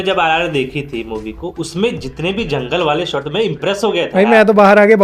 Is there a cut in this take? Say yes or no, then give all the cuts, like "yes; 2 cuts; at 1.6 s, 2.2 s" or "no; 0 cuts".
no; 0 cuts